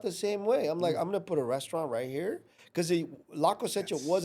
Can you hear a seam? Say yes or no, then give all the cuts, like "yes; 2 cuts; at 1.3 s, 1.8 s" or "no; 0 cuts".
no; 0 cuts